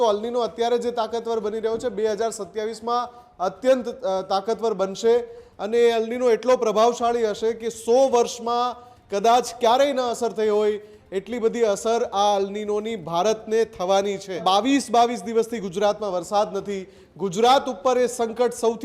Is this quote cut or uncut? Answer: cut